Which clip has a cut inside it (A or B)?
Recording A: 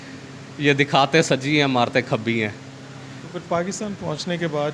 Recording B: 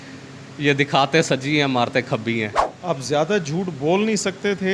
B